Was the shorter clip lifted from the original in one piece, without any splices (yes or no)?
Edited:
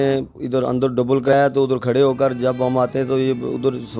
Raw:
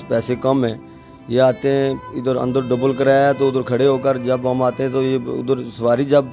no